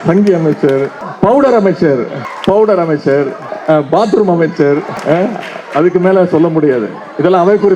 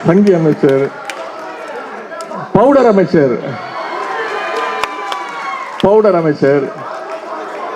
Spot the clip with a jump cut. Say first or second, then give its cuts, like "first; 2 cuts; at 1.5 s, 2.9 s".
first; 4 cuts; at 1.0 s, 2.2 s, 3.5 s, 4.9 s